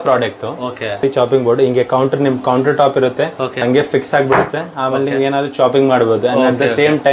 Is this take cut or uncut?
cut